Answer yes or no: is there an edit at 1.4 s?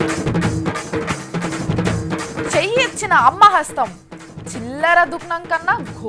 yes